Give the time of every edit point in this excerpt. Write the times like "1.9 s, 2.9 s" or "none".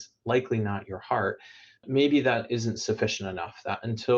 1.8 s

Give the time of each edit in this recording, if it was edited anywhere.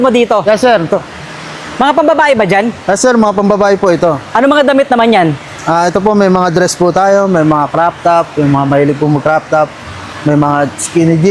none

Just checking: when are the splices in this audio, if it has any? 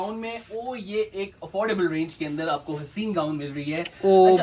none

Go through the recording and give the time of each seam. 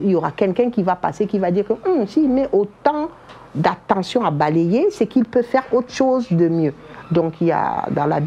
none

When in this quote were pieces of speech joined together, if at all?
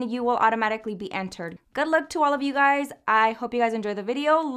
1.4 s

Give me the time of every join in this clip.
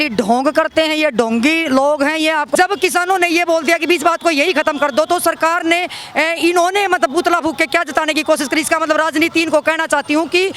2.5 s

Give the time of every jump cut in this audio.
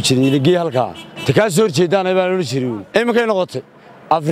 2.8 s

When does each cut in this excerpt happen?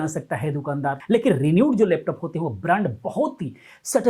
1.0 s

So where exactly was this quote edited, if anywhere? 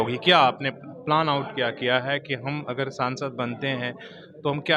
none

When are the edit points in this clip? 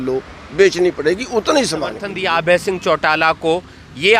1.5 s

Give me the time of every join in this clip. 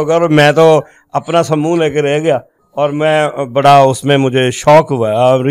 none

